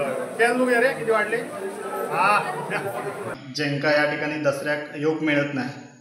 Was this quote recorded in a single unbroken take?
no; 1 cut; at 3.4 s

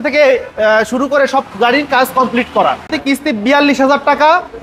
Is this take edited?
yes; 1 cut; at 3.0 s

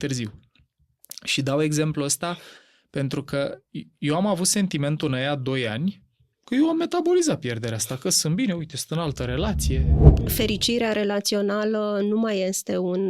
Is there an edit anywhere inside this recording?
yes; 1 cut; at 10.0 s

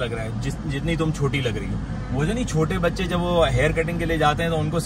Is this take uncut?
yes; 0 cuts

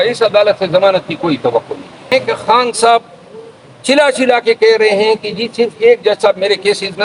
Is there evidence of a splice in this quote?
yes; 1 cut; at 2.1 s

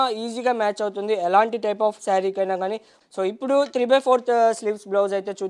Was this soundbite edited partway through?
yes; 1 cut; at 2.9 s

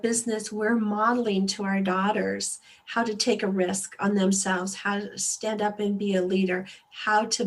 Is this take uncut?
yes; 0 cuts

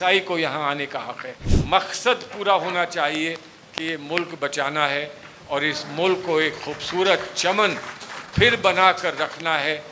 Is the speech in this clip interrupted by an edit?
yes; 1 cut; at 1.5 s

